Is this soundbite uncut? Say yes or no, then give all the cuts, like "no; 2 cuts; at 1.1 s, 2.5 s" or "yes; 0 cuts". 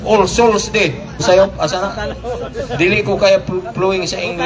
no; 1 cut; at 1.1 s